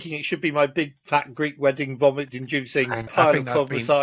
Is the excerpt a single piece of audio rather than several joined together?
yes; 0 cuts

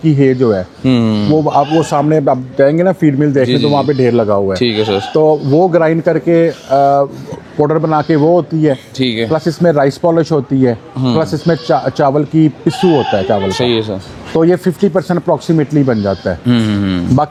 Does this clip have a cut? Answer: no; 0 cuts

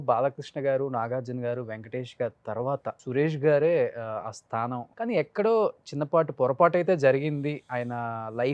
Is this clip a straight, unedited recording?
no; 2 cuts; at 3.0 s, 4.9 s

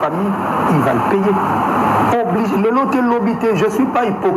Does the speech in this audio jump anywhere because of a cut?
no; 0 cuts

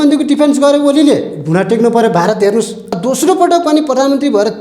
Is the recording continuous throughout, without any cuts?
no; 1 cut; at 2.8 s

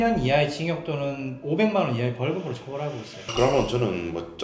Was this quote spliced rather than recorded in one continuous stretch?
yes; 1 cut; at 3.3 s

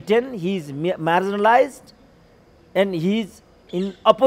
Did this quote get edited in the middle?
no; 0 cuts

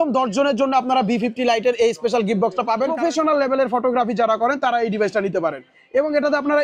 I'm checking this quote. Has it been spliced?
yes; 1 cut; at 2.9 s

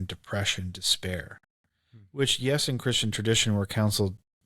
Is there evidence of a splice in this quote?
no; 0 cuts

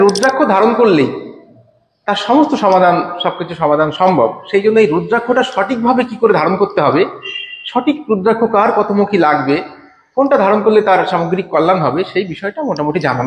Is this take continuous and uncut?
yes; 0 cuts

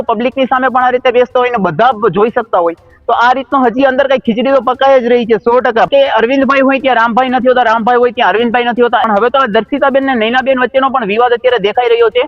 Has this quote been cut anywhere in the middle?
yes; 2 cuts; at 5.9 s, 9.0 s

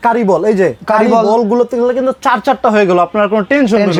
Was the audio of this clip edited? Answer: no; 0 cuts

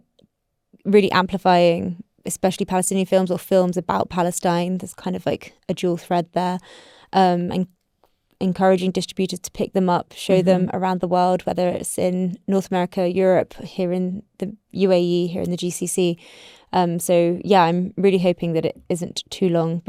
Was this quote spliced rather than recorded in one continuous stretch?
no; 0 cuts

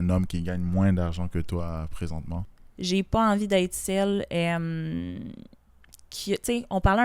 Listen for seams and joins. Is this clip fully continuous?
no; 1 cut; at 2.4 s

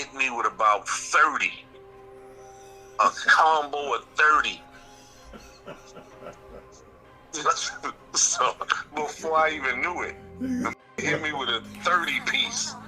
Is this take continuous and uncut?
yes; 0 cuts

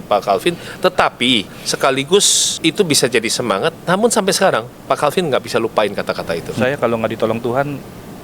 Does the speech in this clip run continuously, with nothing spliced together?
no; 3 cuts; at 1.6 s, 2.4 s, 6.5 s

